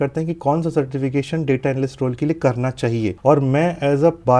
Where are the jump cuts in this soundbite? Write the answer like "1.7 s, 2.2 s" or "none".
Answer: none